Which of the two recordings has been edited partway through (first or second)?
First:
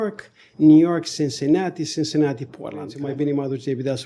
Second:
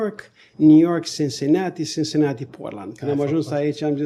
first